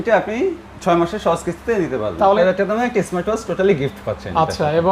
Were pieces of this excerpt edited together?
yes; 1 cut; at 2.4 s

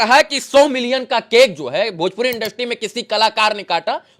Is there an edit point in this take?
no; 0 cuts

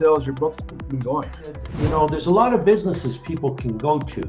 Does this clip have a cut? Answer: yes; 1 cut; at 1.7 s

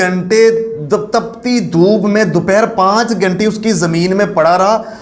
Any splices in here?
no; 0 cuts

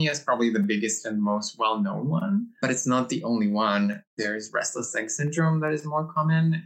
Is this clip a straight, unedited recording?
no; 2 cuts; at 2.6 s, 4.1 s

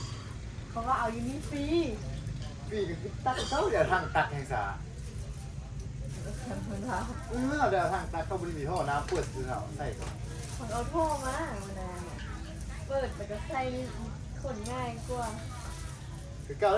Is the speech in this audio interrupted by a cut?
no; 0 cuts

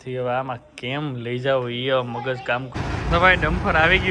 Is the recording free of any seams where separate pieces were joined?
no; 1 cut; at 2.7 s

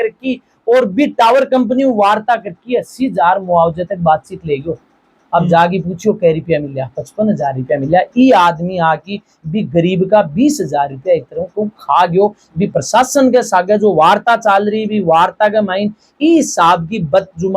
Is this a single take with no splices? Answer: yes; 0 cuts

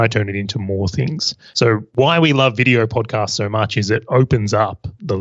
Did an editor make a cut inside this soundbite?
yes; 1 cut; at 1.7 s

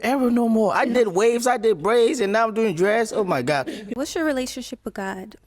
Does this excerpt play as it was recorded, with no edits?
no; 1 cut; at 3.9 s

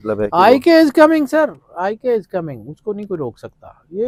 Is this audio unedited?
yes; 0 cuts

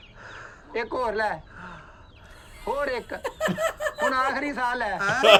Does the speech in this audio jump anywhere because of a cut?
no; 0 cuts

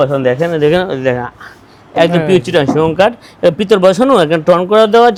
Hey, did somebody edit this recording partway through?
no; 0 cuts

